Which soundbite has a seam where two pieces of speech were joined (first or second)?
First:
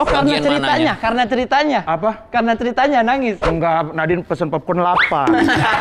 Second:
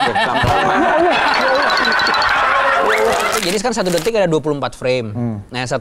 second